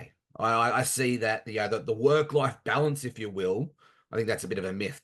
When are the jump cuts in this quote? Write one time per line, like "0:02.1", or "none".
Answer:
none